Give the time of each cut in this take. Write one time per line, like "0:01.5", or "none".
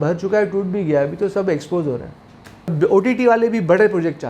0:02.7